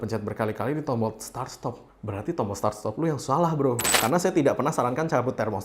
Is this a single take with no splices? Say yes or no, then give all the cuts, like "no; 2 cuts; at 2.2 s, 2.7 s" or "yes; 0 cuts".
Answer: no; 1 cut; at 3.9 s